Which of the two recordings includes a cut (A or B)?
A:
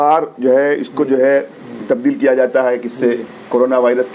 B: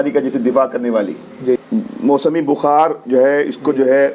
B